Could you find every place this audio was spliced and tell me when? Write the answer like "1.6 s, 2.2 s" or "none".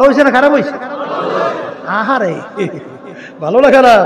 none

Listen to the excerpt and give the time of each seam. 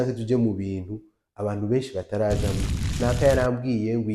3.0 s

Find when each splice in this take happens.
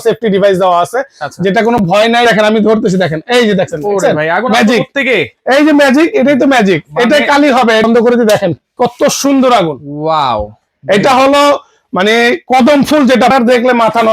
2.2 s, 7.8 s, 13.3 s

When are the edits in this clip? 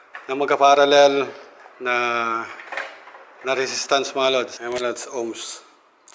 none

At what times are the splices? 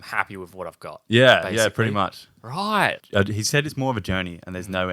3.0 s

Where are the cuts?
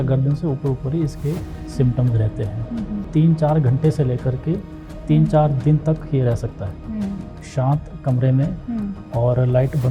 3.0 s, 7.4 s

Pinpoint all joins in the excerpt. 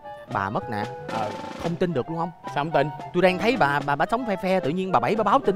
none

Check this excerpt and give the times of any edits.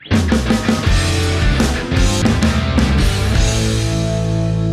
2.2 s

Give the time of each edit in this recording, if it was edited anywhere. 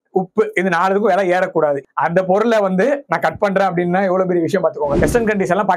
1.8 s, 5.0 s

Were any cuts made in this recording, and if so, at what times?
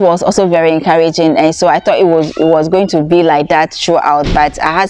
none

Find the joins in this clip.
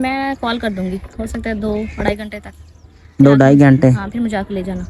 none

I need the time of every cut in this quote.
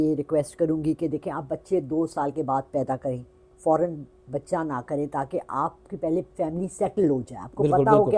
none

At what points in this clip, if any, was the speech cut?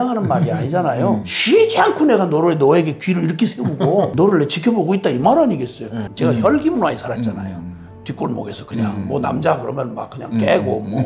1.3 s, 4.1 s, 6.0 s

